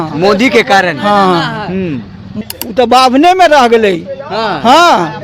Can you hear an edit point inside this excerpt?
yes; 1 cut; at 2.3 s

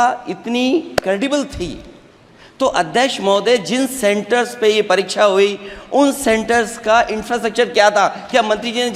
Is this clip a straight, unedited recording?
yes; 0 cuts

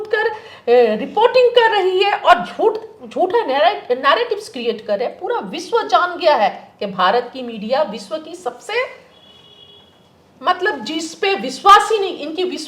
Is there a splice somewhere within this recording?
no; 0 cuts

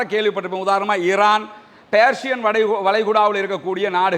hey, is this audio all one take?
yes; 0 cuts

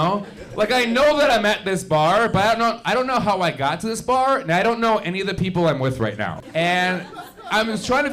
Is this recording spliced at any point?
yes; 1 cut; at 6.4 s

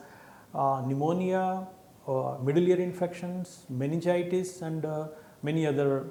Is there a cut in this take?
no; 0 cuts

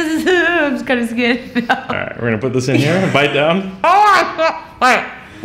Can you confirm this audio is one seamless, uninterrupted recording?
yes; 0 cuts

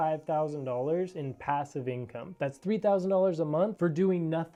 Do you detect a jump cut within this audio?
no; 0 cuts

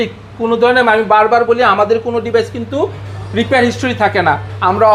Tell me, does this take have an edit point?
no; 0 cuts

